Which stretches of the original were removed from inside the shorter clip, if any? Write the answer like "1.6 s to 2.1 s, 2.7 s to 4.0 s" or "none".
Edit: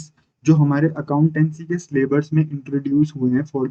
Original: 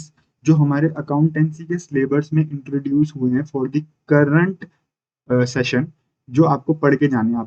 none